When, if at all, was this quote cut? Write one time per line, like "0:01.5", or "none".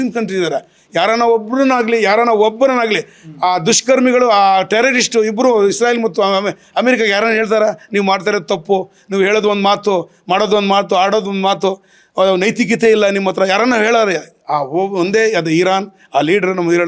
none